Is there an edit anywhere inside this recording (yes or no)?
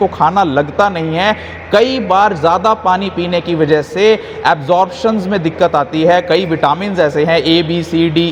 no